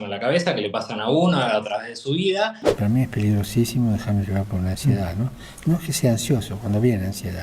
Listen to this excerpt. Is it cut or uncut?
cut